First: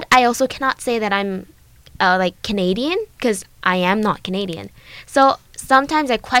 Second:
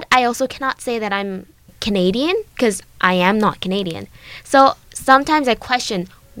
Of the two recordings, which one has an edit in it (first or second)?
second